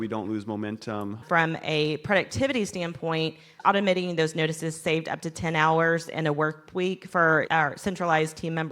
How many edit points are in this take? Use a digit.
2